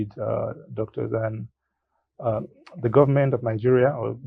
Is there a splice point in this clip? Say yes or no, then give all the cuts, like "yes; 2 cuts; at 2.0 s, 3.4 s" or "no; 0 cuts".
no; 0 cuts